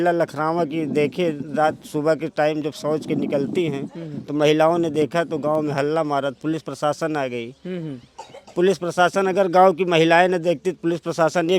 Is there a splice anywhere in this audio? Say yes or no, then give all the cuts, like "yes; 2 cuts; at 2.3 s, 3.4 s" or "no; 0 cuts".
no; 0 cuts